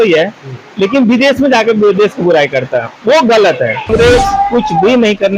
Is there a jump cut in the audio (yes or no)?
yes